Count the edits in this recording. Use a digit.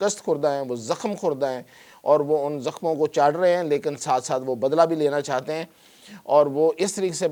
0